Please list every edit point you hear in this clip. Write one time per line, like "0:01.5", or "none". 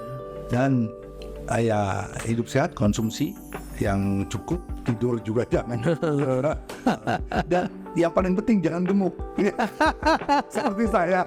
none